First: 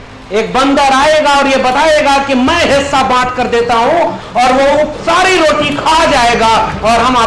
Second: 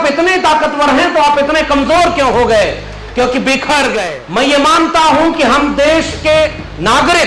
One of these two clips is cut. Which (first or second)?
second